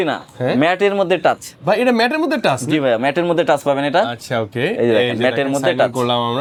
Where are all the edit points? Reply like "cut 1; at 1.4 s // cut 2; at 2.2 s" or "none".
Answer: none